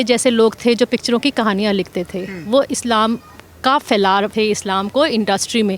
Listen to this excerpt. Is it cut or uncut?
uncut